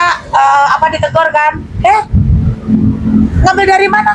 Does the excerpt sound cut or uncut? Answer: uncut